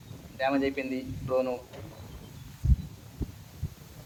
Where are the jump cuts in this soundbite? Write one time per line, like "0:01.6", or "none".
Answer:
none